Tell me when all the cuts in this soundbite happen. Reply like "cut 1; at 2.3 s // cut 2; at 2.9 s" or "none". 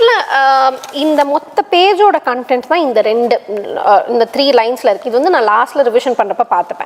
none